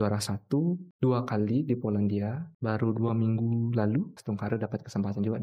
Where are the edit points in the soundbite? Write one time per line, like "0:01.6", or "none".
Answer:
0:00.9
0:02.5
0:04.2